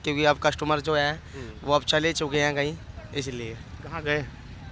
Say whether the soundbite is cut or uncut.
uncut